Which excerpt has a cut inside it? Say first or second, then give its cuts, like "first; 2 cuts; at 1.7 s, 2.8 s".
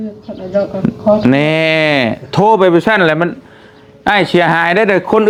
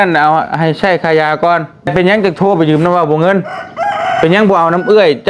second; 1 cut; at 1.9 s